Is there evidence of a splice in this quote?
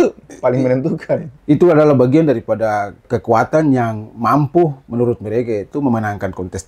yes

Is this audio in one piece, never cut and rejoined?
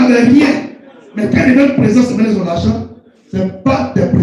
yes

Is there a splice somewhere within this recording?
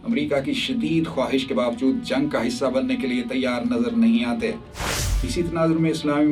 yes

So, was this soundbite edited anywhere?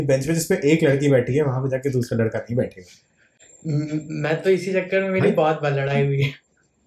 no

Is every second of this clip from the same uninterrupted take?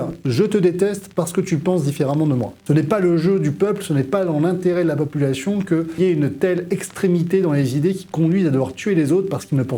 no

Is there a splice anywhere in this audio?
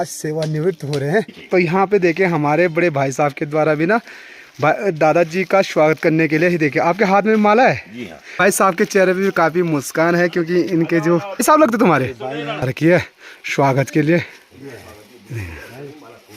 yes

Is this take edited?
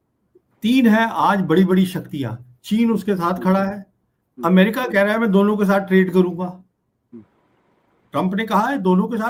no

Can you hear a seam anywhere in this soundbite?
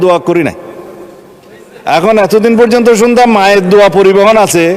no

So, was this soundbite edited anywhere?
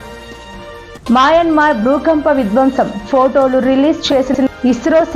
yes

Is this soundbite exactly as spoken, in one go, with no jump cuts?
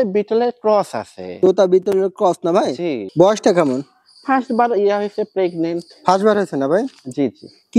no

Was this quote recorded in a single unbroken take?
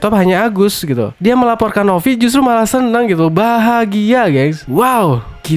no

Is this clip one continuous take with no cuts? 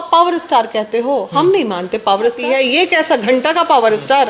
no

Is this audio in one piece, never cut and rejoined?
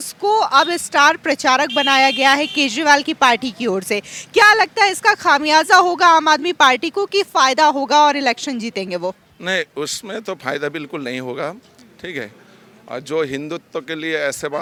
yes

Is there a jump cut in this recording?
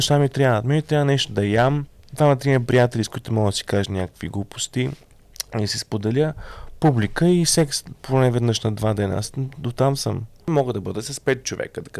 yes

